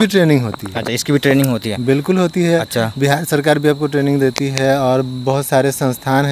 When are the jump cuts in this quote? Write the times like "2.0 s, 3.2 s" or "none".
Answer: none